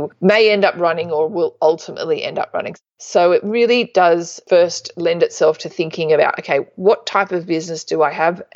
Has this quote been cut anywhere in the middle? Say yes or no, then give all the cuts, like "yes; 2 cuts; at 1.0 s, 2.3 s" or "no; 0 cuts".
yes; 1 cut; at 2.7 s